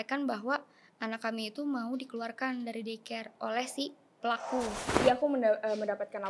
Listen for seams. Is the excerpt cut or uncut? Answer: cut